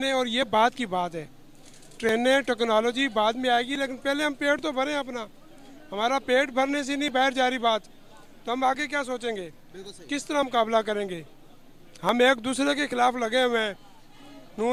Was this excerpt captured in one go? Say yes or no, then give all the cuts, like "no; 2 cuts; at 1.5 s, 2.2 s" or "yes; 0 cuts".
yes; 0 cuts